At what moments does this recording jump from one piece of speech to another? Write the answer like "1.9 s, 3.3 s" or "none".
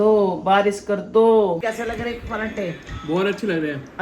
1.6 s